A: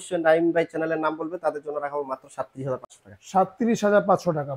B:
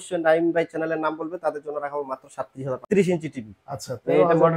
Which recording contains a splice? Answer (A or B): B